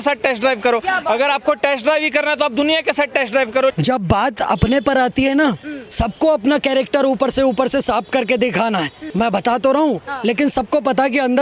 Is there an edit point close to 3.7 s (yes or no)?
yes